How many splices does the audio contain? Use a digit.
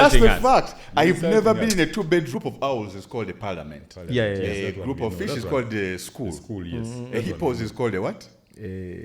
1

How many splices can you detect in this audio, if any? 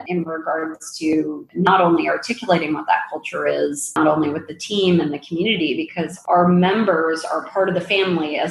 1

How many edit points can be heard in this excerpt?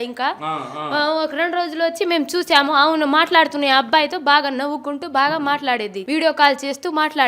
1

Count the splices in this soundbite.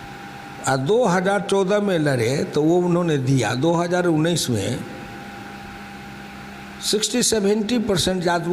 0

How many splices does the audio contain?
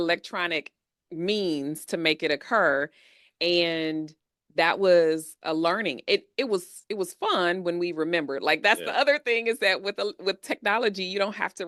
0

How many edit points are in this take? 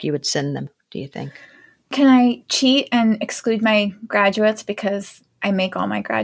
0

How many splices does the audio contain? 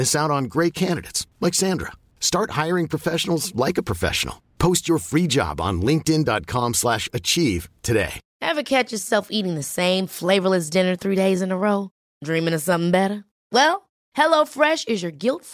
1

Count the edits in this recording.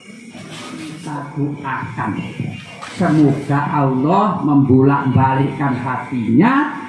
1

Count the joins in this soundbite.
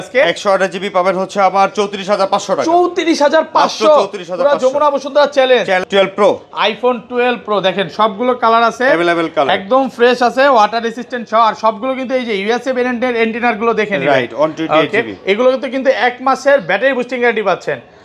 1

